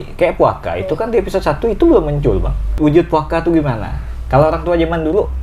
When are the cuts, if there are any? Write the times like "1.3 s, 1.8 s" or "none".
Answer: 2.7 s